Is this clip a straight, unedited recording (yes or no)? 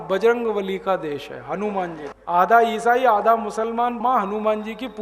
no